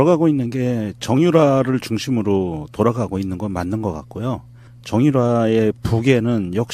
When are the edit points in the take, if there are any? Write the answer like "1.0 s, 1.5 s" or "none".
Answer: 1.5 s